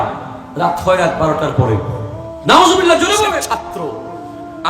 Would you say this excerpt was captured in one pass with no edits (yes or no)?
no